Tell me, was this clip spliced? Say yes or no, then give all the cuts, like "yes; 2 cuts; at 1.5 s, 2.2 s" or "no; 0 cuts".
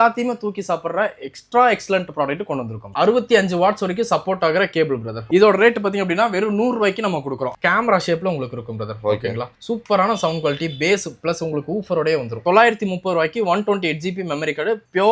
yes; 3 cuts; at 2.8 s, 7.5 s, 12.3 s